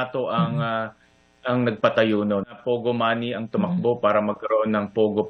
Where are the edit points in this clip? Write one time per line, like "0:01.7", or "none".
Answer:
0:02.6